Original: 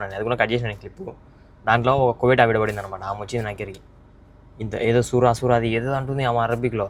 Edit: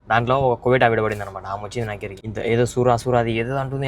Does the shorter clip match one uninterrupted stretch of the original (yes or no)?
no